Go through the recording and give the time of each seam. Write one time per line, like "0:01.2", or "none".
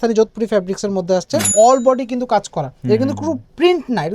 0:01.5